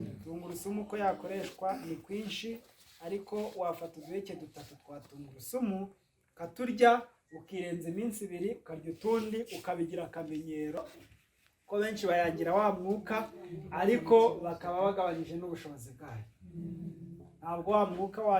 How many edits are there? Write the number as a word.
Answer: one